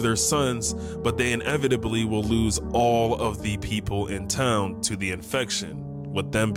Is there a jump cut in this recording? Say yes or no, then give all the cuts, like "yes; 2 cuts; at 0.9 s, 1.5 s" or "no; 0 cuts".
no; 0 cuts